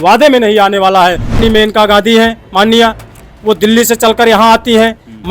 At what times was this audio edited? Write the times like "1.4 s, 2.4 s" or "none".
1.4 s

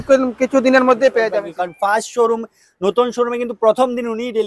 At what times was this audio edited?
1.4 s

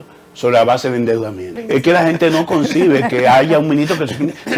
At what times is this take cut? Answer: 1.6 s

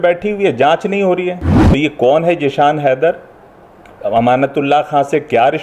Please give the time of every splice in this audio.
1.6 s

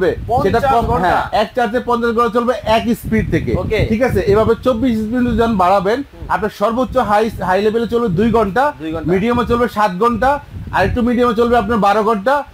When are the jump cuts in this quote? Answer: none

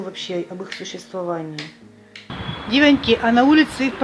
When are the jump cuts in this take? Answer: 2.2 s

